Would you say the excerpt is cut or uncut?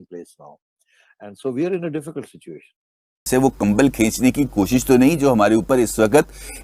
cut